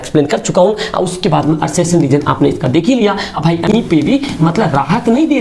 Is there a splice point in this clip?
yes; 1 cut; at 3.7 s

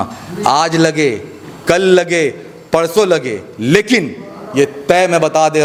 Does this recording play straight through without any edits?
yes; 0 cuts

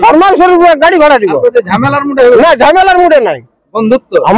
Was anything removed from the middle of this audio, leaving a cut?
no; 0 cuts

